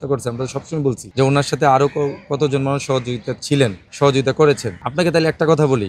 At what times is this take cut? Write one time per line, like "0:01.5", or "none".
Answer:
0:01.0
0:03.8
0:04.8